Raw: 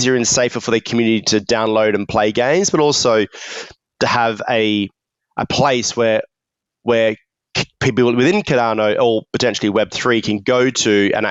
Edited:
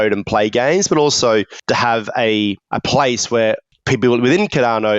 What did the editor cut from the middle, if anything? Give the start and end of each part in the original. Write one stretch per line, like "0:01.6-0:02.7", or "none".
0:03.4-0:03.9
0:05.0-0:05.3
0:06.4-0:07.7